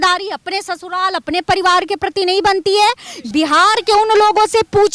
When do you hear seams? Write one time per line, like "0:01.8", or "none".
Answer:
0:03.3